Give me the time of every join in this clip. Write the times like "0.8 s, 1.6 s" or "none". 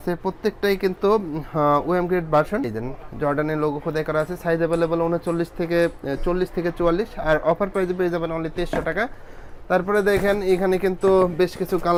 none